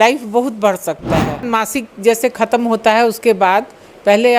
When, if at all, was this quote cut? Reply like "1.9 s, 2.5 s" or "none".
1.5 s